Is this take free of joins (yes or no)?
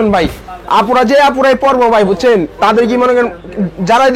yes